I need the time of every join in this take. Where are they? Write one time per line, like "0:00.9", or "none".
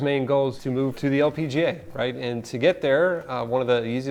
0:00.9